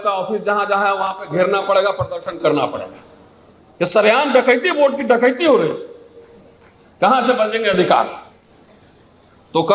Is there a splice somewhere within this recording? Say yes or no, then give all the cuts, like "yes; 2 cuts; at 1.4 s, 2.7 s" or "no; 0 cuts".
no; 0 cuts